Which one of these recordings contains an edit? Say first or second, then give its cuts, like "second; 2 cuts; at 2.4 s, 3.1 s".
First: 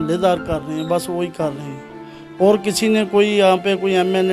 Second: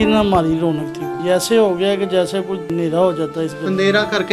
second; 2 cuts; at 1.1 s, 2.7 s